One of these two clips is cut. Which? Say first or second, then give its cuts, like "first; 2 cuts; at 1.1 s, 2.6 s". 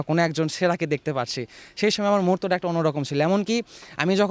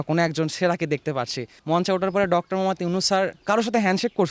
second; 1 cut; at 1.5 s